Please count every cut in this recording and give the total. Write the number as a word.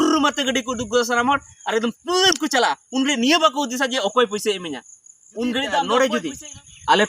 one